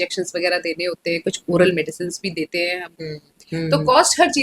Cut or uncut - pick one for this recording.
cut